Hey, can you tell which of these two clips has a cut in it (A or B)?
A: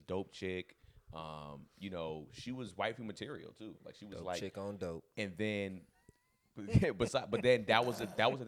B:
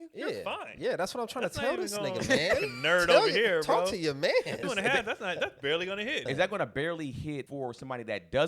B